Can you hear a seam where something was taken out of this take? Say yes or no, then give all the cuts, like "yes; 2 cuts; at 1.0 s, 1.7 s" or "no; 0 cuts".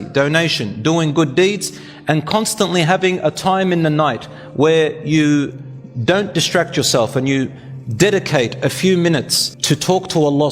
no; 0 cuts